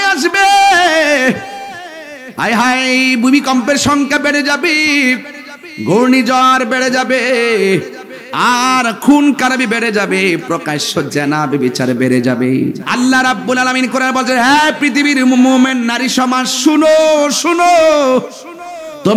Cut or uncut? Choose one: cut